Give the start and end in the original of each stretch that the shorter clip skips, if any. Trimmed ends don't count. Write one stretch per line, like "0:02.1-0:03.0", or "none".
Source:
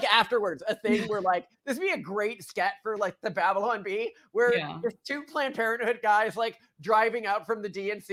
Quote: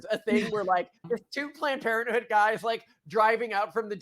0:01.5-0:04.7